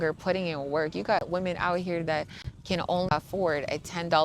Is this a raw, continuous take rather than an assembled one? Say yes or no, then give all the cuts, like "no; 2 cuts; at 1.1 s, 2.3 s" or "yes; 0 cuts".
no; 1 cut; at 3.1 s